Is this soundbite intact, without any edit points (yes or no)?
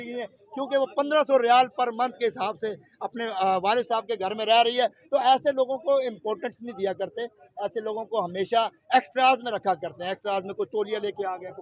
yes